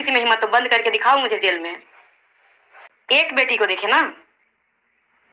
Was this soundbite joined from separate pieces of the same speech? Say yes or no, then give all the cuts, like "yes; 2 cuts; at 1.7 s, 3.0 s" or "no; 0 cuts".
yes; 1 cut; at 2.9 s